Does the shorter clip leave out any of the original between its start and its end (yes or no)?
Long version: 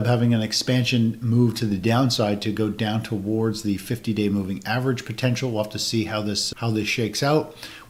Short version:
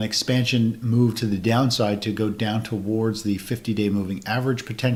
no